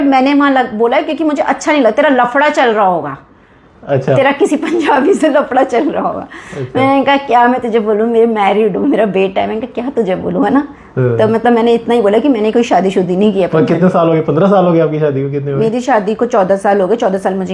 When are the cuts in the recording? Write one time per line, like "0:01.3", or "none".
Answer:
none